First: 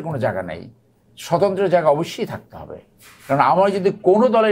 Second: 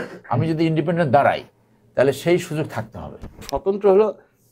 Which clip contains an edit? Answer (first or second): second